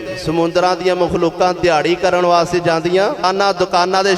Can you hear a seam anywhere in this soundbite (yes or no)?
yes